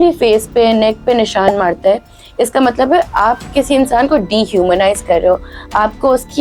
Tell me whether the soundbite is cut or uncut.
uncut